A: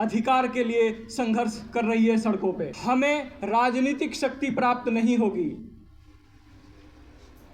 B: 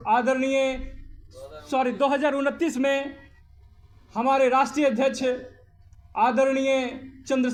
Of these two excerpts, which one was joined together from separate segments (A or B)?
A